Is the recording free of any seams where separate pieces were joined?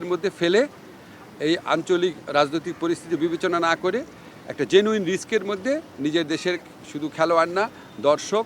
yes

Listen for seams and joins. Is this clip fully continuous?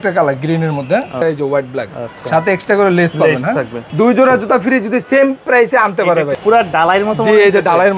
no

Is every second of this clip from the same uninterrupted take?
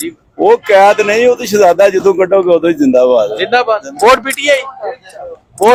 yes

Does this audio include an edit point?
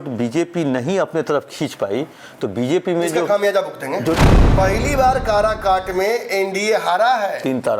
yes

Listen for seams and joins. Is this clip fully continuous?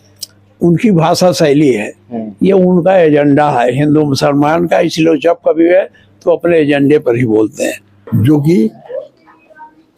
no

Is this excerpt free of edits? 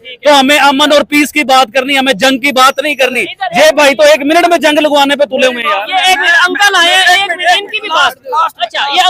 yes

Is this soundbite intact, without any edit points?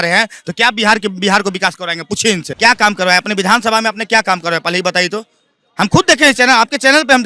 no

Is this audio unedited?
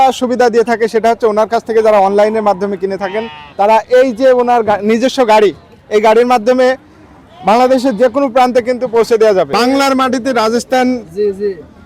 no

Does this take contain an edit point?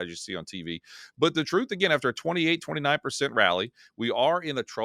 no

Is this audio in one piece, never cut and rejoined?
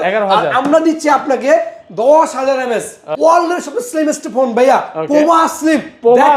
no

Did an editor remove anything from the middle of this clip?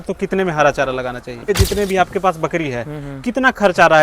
yes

